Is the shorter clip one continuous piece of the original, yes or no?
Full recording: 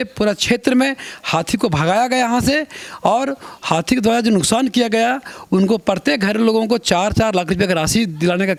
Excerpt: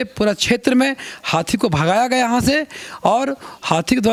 yes